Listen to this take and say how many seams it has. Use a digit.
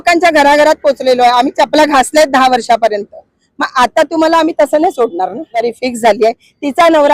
1